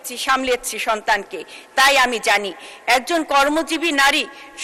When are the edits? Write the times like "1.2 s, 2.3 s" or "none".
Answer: none

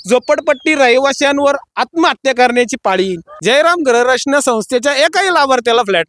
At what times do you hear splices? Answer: 3.3 s

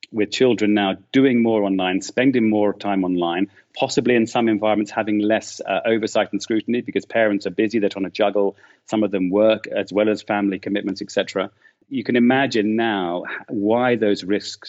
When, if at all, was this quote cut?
none

